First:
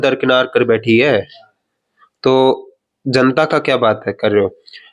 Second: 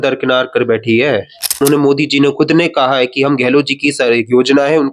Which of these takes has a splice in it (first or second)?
second